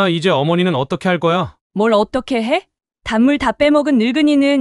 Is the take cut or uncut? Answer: cut